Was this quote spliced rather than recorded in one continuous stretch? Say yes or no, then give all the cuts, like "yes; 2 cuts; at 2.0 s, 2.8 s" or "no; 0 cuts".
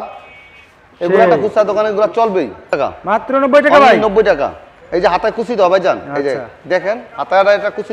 yes; 1 cut; at 2.8 s